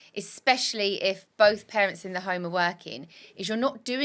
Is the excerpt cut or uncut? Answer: uncut